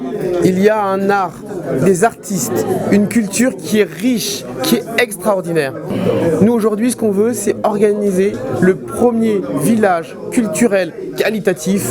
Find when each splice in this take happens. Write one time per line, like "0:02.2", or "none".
0:05.8

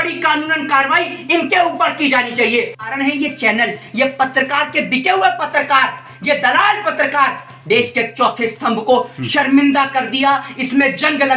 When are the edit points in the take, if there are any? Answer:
0:02.8

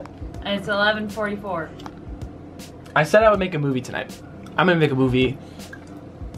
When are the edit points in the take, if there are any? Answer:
none

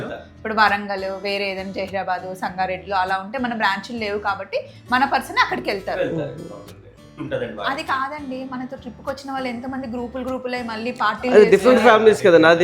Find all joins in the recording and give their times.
0:07.1

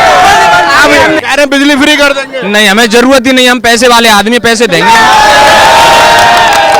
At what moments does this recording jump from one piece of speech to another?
0:01.2

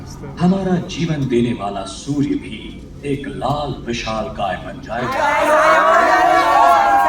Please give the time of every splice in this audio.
0:05.1

